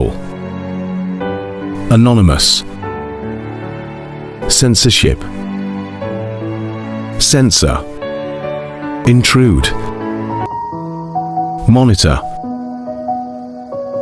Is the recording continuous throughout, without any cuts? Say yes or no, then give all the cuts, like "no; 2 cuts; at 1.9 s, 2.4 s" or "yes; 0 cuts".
no; 1 cut; at 9.0 s